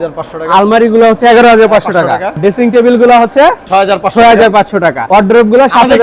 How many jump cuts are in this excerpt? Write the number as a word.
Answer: two